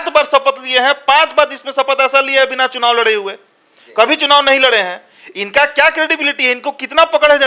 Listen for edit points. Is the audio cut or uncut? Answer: uncut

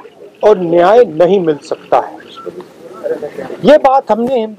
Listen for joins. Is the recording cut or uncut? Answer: uncut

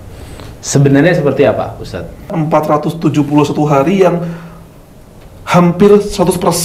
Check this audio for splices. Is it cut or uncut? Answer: cut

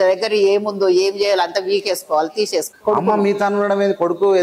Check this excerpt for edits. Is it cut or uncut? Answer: cut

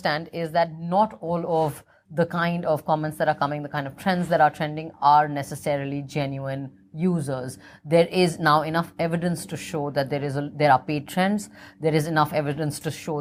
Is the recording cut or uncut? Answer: uncut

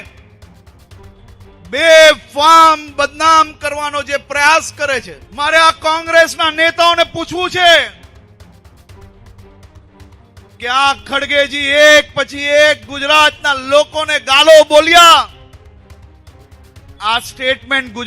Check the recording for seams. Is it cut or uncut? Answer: cut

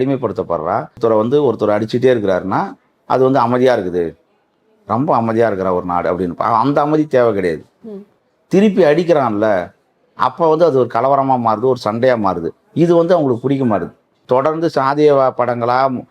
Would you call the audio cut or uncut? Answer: cut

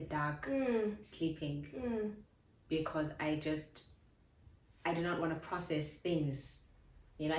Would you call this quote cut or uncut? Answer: uncut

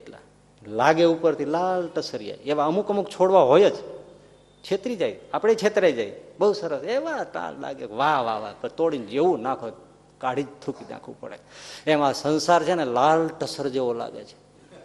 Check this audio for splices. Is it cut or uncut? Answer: uncut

